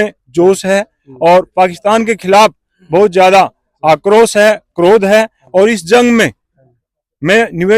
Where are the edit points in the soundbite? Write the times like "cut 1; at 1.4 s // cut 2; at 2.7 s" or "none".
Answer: none

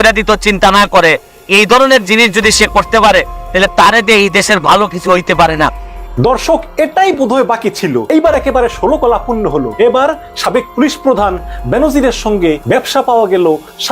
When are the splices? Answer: cut 1; at 5.9 s // cut 2; at 8.1 s // cut 3; at 9.7 s // cut 4; at 12.6 s

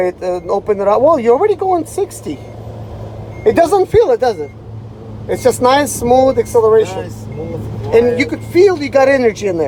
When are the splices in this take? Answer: none

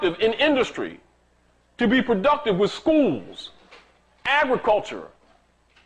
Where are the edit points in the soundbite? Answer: none

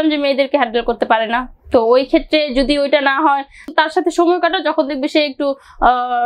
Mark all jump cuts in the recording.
cut 1; at 3.7 s

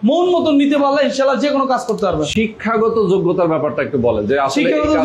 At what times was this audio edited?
none

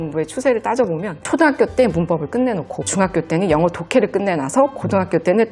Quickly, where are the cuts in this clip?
none

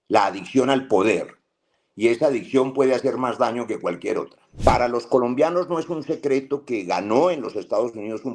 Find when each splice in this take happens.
cut 1; at 4.4 s

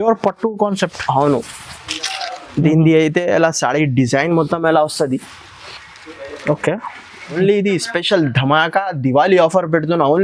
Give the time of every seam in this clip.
cut 1; at 7.3 s

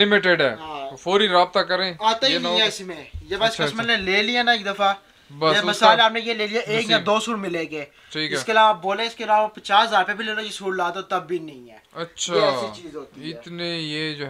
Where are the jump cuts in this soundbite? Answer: none

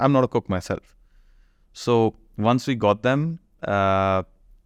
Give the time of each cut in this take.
none

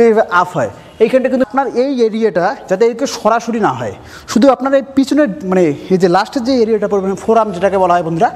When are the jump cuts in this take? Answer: cut 1; at 1.4 s

